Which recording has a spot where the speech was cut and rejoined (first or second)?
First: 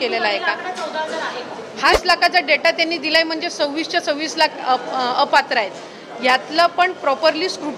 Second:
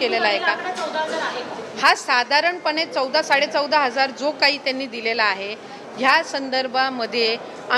first